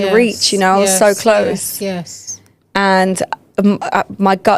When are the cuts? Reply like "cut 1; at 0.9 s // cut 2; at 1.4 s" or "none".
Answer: none